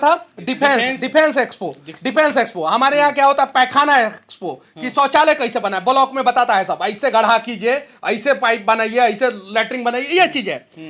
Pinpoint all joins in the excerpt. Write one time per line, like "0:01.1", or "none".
none